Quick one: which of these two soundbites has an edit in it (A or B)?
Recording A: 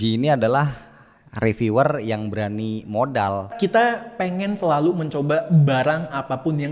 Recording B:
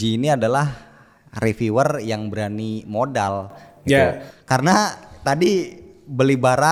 A